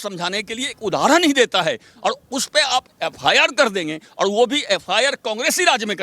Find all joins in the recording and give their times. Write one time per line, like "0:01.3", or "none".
none